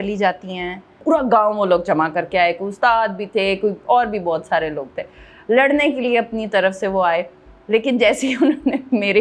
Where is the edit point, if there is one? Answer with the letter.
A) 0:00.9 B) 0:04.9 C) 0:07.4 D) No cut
A